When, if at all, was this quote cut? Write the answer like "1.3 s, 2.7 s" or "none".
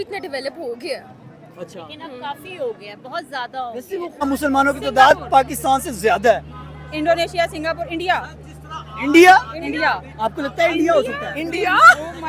4.2 s